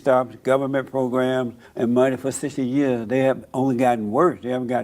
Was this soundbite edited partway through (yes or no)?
yes